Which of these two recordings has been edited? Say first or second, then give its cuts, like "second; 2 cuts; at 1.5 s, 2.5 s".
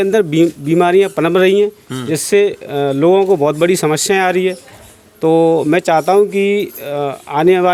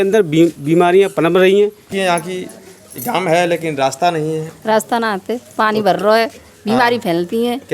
second; 1 cut; at 1.9 s